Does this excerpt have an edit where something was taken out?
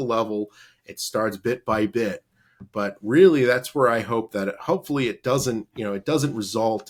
no; 0 cuts

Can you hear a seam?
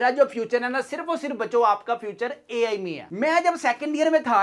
yes; 1 cut; at 3.1 s

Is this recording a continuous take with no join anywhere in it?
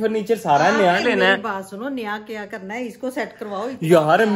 yes; 0 cuts

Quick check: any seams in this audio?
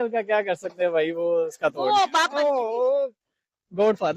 no; 0 cuts

